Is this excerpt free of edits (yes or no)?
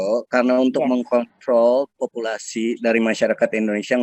yes